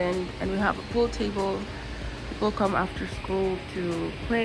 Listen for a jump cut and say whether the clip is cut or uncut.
uncut